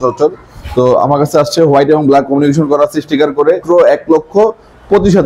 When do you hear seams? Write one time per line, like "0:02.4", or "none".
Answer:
0:03.6